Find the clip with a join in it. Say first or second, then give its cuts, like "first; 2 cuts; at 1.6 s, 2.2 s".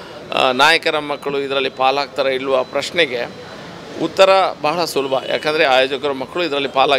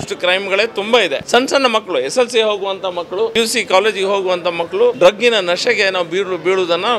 second; 3 cuts; at 1.2 s, 3.3 s, 5.0 s